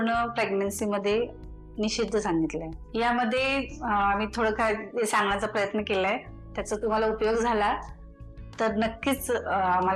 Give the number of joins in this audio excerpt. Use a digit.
0